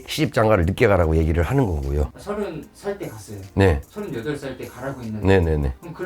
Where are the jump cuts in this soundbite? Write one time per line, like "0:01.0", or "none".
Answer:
0:02.2